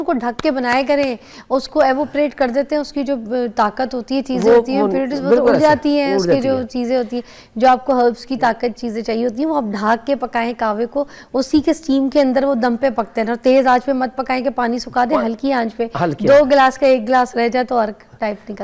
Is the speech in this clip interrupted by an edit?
no; 0 cuts

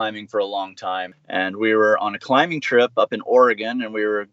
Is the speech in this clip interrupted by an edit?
yes; 1 cut; at 1.1 s

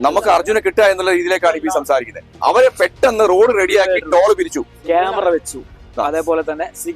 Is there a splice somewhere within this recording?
yes; 1 cut; at 2.3 s

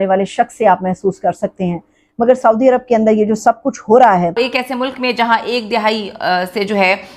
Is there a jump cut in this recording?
yes; 1 cut; at 4.4 s

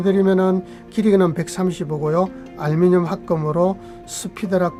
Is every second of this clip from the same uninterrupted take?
yes; 0 cuts

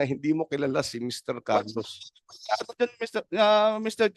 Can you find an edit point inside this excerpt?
no; 0 cuts

